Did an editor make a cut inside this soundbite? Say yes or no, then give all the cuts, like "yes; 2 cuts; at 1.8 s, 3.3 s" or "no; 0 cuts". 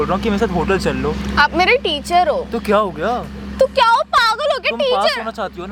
no; 0 cuts